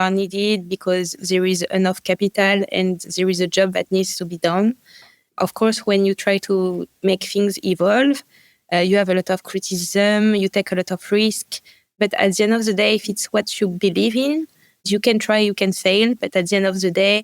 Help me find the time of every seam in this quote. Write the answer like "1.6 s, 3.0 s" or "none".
12.0 s, 14.9 s